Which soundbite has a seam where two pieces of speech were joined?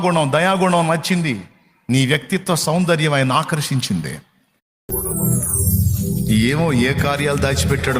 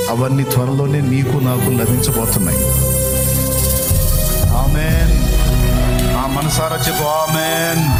first; 1 cut; at 4.9 s

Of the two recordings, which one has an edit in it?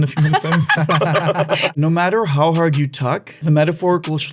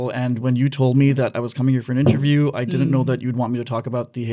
first; 2 cuts; at 1.7 s, 3.3 s

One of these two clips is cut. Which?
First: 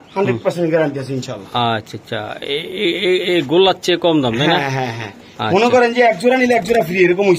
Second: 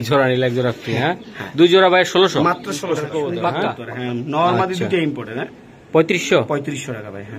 second; 1 cut; at 2.9 s

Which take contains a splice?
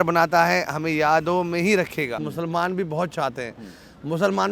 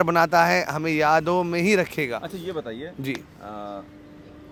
first; 1 cut; at 2.2 s

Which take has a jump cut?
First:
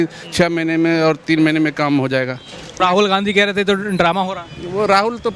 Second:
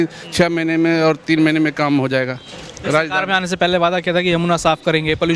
first; 1 cut; at 2.8 s

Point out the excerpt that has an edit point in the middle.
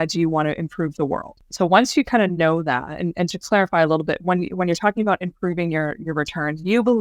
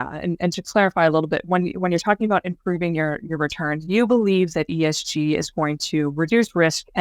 first; 1 cut; at 1.4 s

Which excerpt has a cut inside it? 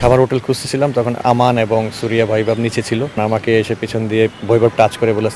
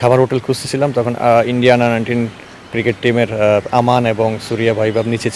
first; 3 cuts; at 1.2 s, 3.1 s, 4.4 s

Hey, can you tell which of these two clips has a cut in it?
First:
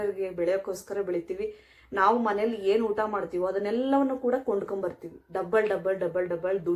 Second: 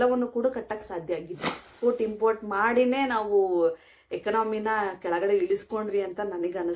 second; 1 cut; at 1.7 s

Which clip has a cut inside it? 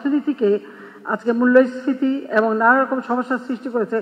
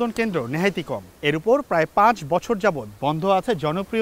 second; 1 cut; at 1.0 s

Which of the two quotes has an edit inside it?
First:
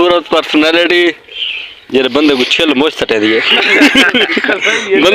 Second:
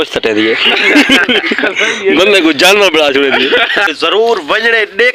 second; 1 cut; at 3.9 s

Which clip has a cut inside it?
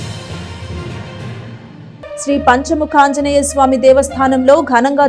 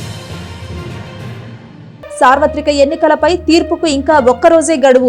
first; 1 cut; at 1.6 s

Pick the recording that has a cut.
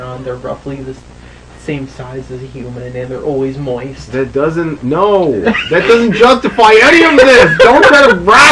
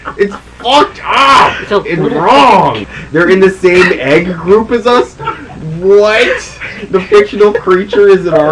second; 1 cut; at 2.8 s

